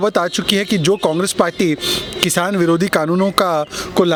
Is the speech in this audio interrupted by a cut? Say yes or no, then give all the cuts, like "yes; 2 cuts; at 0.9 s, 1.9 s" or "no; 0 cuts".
no; 0 cuts